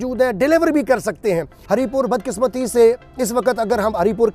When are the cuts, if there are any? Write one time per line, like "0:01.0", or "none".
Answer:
0:01.5